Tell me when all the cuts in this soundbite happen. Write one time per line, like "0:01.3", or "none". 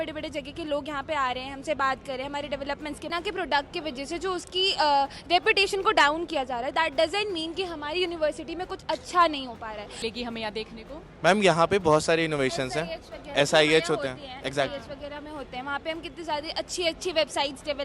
0:03.1
0:10.0